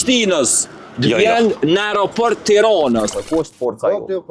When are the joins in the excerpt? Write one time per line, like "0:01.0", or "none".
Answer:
0:03.1

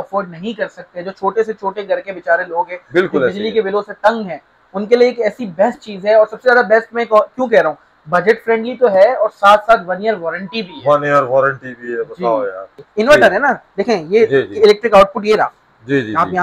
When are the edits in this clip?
0:12.7

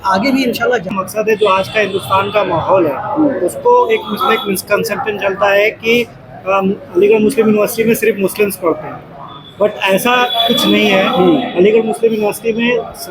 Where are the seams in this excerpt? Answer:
0:01.1

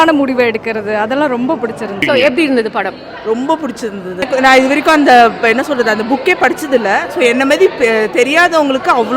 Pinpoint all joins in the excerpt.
0:01.9
0:04.3

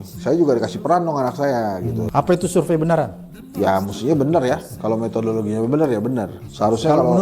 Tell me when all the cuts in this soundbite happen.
0:02.0

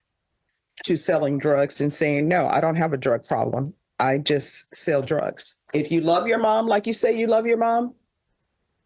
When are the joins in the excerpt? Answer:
0:05.6

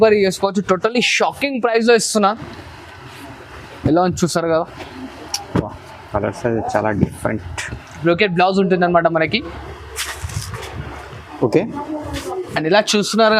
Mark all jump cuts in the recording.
0:08.0

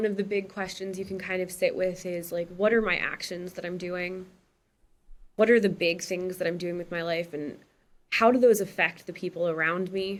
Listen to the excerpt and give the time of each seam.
none

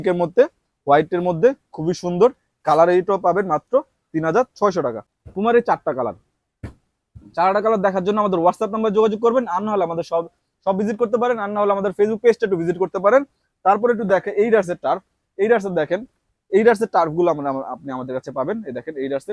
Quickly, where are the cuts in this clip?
none

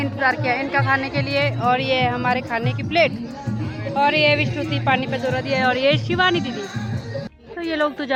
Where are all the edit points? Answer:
none

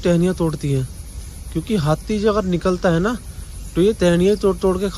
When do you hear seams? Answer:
none

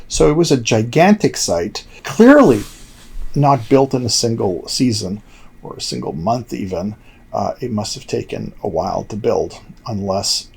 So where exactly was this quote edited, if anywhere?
0:02.0

